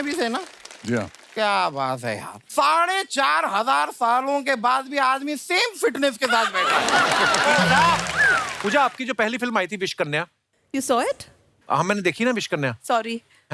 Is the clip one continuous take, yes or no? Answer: no